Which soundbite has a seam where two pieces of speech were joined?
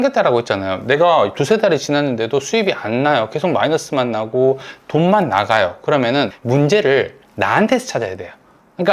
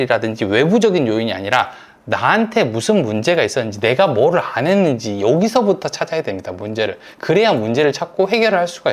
first; 1 cut; at 6.4 s

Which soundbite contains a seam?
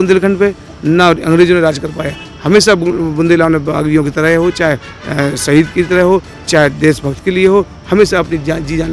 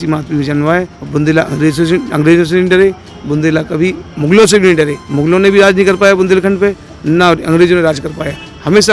second; 2 cuts; at 1.0 s, 5.0 s

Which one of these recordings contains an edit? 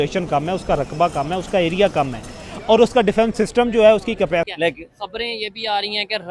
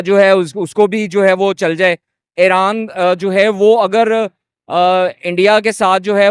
first; 1 cut; at 4.5 s

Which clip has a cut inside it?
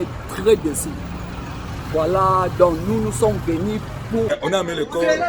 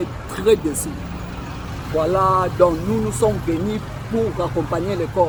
first; 1 cut; at 4.3 s

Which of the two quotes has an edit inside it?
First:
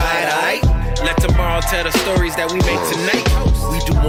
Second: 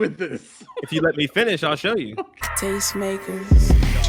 second; 1 cut; at 2.4 s

